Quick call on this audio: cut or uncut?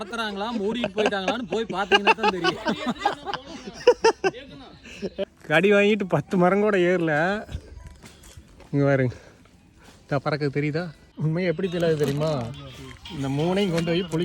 cut